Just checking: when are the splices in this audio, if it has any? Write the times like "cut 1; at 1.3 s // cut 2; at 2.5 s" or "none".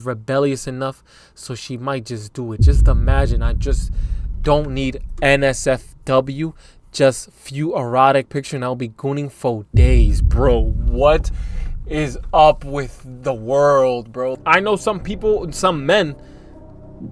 cut 1; at 14.4 s